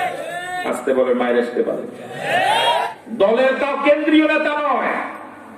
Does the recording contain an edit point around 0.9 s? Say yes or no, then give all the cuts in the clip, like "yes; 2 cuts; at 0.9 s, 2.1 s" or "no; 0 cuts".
no; 1 cut; at 2.9 s